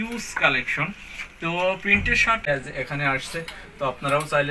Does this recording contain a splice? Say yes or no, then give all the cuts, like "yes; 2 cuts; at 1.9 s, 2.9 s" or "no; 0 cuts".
yes; 1 cut; at 2.4 s